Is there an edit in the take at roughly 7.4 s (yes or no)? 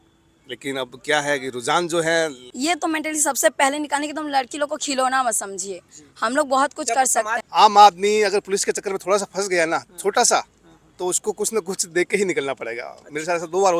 yes